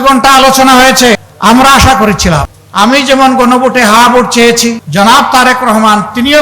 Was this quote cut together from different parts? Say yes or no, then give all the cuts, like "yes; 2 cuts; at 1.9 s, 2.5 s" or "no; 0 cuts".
yes; 3 cuts; at 1.3 s, 2.6 s, 4.8 s